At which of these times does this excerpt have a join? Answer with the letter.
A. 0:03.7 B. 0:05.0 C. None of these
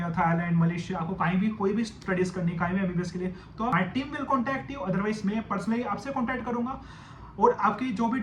A